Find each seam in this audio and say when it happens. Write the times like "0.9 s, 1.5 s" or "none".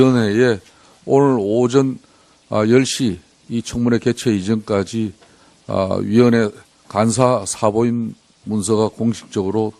1.5 s